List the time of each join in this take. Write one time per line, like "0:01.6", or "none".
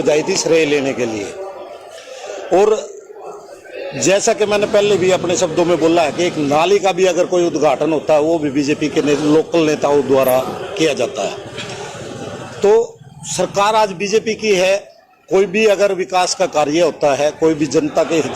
none